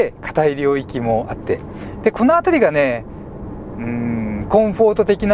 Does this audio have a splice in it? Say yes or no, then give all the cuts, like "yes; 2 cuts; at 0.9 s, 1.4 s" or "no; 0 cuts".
no; 0 cuts